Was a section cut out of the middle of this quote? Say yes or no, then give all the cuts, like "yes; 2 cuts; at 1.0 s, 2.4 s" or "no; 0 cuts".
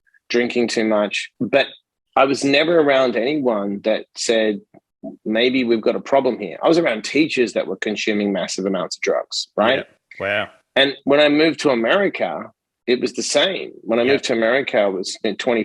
yes; 1 cut; at 1.2 s